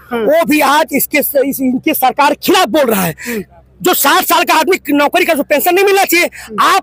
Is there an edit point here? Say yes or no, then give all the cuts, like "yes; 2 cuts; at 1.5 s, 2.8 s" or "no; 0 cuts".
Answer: no; 0 cuts